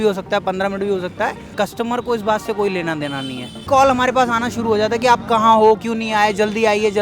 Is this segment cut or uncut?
cut